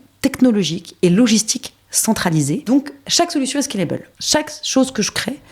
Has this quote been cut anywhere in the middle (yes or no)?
yes